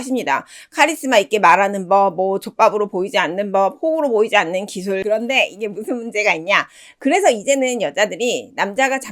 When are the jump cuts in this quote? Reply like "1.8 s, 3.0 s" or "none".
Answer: 5.0 s

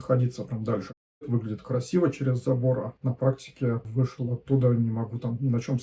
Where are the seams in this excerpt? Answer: 1.2 s, 2.9 s, 3.9 s

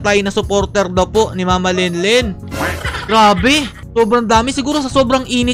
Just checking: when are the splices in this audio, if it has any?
2.4 s

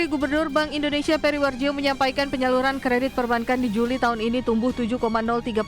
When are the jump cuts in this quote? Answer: none

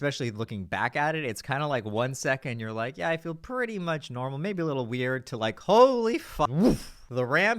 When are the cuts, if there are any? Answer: 6.5 s

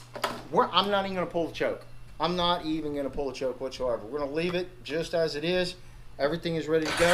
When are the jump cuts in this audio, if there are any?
none

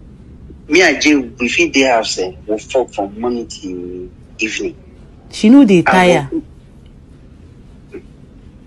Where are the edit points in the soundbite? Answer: none

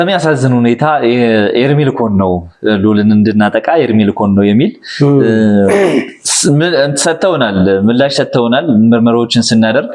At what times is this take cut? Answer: none

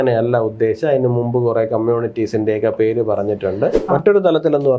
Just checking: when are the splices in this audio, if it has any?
3.8 s

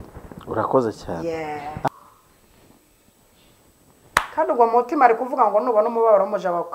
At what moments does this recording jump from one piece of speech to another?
1.9 s

